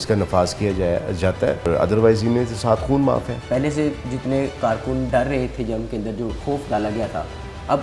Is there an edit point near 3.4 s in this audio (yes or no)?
yes